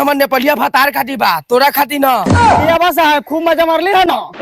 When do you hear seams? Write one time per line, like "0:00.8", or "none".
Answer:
none